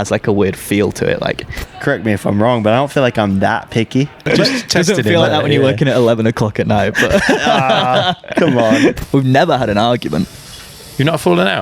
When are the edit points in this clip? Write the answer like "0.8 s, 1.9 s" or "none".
1.7 s, 4.2 s, 9.0 s